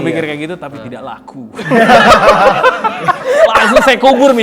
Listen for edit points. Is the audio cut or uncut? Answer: cut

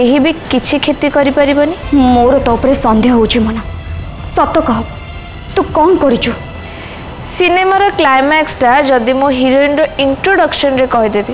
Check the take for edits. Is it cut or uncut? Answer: cut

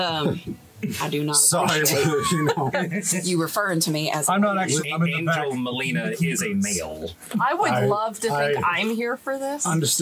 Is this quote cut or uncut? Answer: uncut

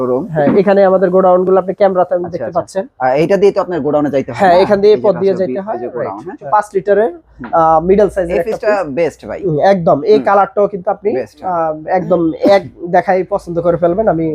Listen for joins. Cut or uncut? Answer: cut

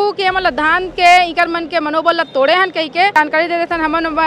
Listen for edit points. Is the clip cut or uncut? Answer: cut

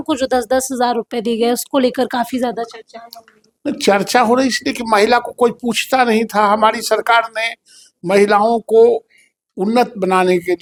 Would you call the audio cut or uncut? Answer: uncut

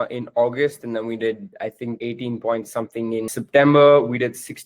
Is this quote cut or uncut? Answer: cut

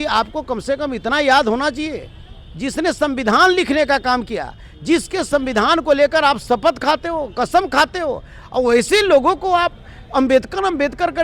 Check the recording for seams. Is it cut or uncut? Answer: uncut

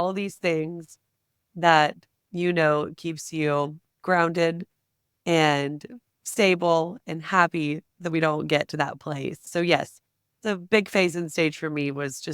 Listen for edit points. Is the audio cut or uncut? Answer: cut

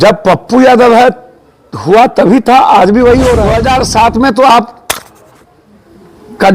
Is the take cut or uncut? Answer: cut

